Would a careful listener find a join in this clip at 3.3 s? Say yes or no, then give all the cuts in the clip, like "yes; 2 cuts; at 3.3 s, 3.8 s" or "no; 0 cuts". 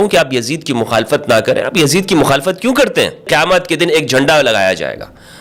yes; 1 cut; at 3.3 s